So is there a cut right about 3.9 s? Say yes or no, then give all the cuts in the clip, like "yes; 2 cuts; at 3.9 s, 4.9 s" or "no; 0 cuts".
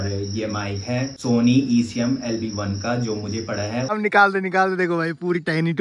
yes; 2 cuts; at 1.2 s, 3.9 s